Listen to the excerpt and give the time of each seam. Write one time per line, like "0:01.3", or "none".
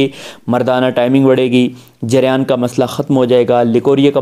none